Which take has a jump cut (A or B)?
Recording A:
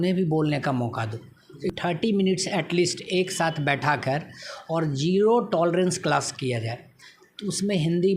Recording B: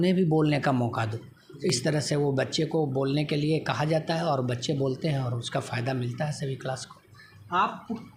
A